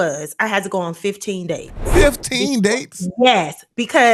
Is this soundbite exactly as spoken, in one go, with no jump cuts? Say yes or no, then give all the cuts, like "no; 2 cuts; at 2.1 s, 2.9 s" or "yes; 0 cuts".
yes; 0 cuts